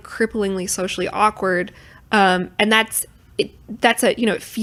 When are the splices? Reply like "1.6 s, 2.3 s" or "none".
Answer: none